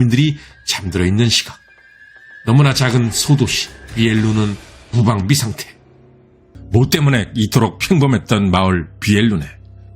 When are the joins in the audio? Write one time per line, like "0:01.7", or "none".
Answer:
0:06.4